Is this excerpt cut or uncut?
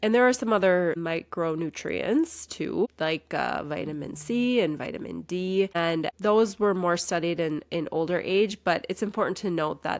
cut